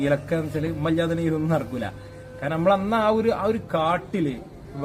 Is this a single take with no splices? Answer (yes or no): yes